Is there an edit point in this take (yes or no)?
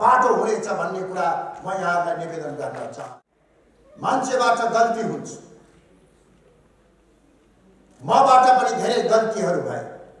yes